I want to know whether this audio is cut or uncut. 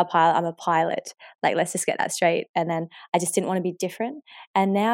uncut